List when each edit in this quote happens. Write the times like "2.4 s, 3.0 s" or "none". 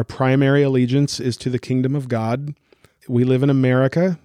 3.0 s